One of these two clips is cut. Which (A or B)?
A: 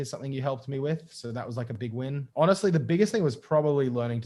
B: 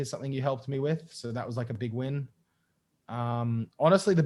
A